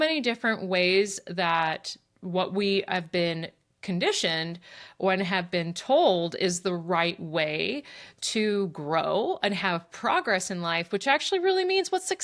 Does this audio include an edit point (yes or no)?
no